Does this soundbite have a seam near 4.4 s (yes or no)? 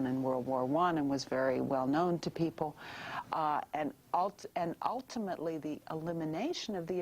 no